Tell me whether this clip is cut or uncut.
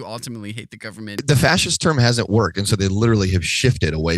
cut